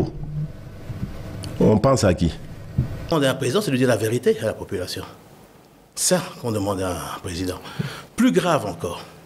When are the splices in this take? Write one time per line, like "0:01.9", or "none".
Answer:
0:03.1